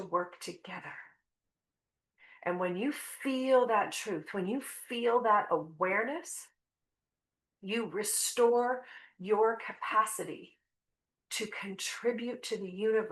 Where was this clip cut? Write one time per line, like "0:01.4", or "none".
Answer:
none